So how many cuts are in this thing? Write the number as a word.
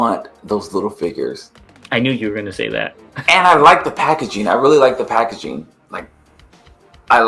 zero